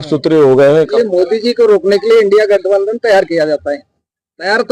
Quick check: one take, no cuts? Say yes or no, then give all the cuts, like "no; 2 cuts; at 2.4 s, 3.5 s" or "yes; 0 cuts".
no; 1 cut; at 0.9 s